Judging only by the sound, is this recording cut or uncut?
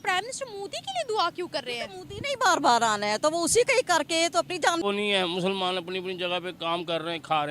cut